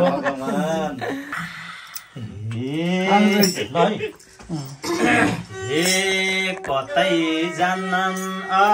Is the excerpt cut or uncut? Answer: cut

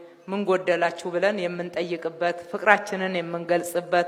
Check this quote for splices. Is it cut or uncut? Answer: uncut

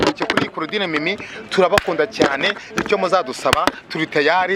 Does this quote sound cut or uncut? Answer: uncut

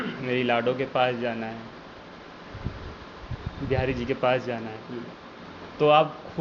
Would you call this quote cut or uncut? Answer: uncut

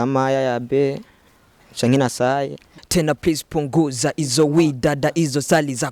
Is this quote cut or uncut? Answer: cut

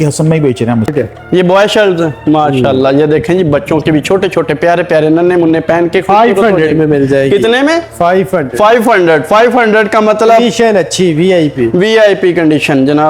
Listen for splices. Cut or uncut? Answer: cut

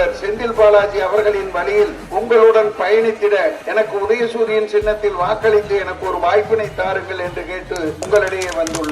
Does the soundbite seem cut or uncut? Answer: cut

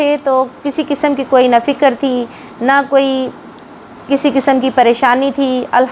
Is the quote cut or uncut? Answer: uncut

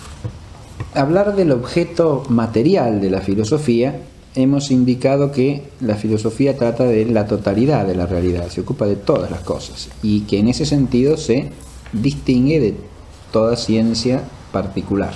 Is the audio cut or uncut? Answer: uncut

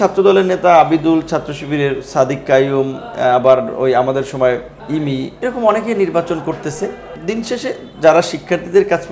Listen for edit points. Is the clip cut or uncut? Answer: cut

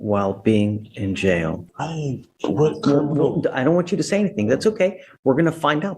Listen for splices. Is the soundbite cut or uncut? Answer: cut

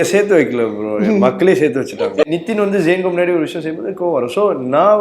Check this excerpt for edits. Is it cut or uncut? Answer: cut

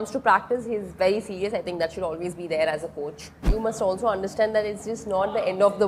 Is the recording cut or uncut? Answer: cut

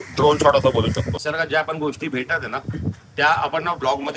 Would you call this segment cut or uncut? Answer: cut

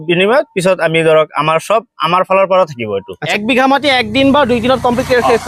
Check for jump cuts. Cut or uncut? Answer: cut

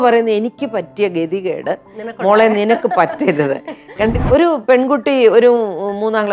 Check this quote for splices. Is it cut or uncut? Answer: cut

